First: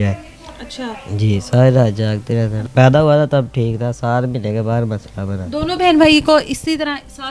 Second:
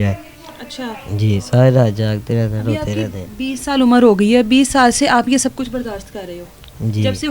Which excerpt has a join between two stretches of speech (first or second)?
first